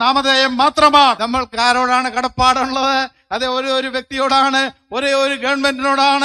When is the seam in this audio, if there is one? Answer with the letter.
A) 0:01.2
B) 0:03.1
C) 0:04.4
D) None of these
A